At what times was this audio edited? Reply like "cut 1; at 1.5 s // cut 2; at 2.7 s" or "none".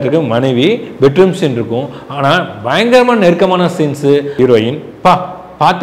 cut 1; at 4.4 s